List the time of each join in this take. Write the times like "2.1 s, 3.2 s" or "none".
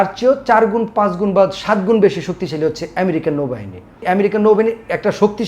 4.0 s